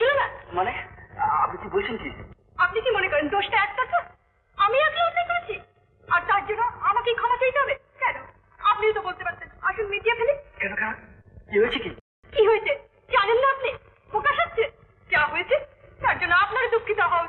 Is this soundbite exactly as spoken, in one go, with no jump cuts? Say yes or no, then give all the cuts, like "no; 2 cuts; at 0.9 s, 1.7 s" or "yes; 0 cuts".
yes; 0 cuts